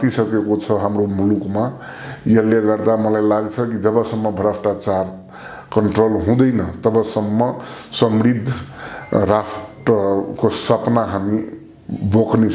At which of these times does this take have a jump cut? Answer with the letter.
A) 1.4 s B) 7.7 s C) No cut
C